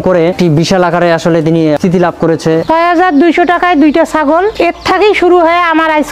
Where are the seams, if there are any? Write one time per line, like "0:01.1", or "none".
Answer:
0:02.6
0:04.5